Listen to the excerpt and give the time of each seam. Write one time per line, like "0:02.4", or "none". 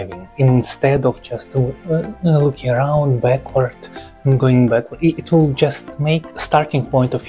0:06.4

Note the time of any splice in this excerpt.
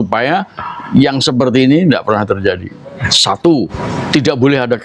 0:03.2
0:03.8

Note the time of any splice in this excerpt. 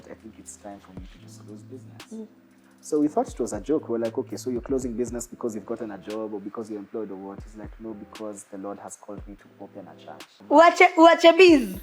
0:10.3

